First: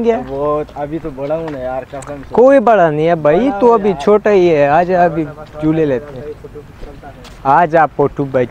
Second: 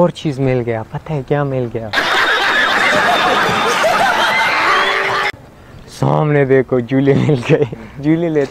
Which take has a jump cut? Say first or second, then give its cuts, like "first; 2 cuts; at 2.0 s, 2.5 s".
second; 3 cuts; at 0.9 s, 1.9 s, 5.4 s